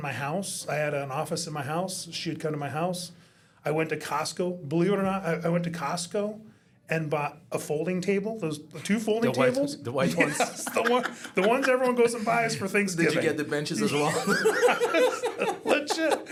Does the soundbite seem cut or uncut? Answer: uncut